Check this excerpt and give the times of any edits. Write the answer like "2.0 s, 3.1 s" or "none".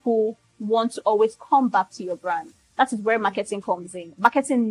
none